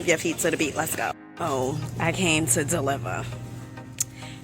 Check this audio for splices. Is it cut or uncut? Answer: cut